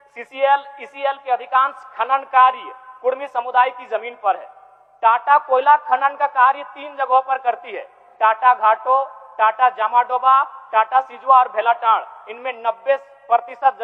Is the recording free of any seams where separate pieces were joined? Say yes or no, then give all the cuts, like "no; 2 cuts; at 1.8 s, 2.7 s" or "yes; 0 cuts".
yes; 0 cuts